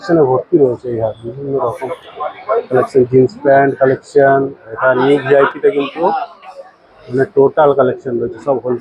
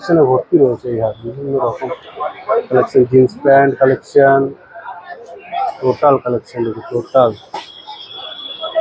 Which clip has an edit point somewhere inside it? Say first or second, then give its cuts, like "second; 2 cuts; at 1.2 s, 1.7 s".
first; 1 cut; at 4.7 s